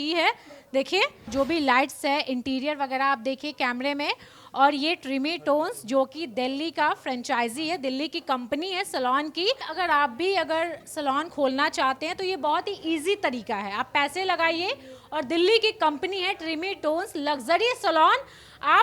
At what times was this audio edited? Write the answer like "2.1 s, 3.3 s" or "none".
1.3 s, 9.7 s